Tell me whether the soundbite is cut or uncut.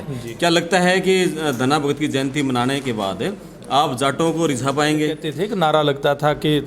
cut